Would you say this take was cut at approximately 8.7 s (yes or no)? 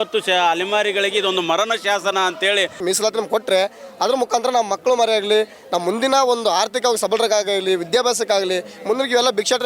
no